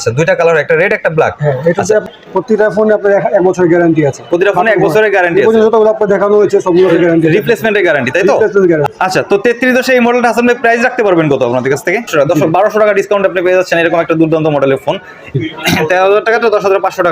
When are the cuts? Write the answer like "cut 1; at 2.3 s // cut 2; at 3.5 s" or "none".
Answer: cut 1; at 2.0 s // cut 2; at 8.8 s // cut 3; at 12.1 s // cut 4; at 15.4 s